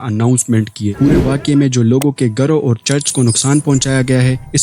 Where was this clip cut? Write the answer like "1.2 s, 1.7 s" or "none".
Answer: 0.9 s